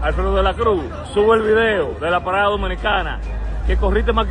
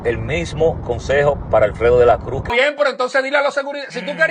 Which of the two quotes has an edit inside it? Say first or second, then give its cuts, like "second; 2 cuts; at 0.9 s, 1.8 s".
second; 1 cut; at 2.5 s